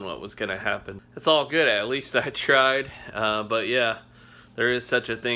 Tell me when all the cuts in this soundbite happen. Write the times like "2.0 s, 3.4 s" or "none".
0.9 s